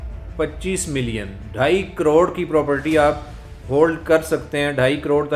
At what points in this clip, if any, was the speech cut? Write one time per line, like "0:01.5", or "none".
none